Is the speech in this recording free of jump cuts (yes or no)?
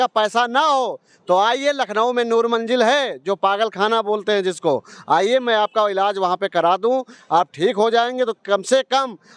yes